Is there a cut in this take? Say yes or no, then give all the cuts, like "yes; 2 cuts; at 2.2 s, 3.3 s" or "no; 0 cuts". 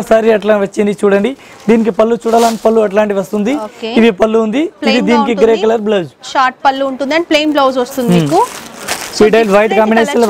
no; 0 cuts